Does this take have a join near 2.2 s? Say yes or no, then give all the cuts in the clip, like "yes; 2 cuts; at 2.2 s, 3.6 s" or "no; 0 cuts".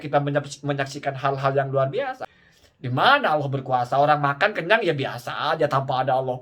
yes; 1 cut; at 2.2 s